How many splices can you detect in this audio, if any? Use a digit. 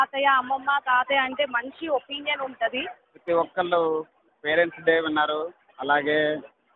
1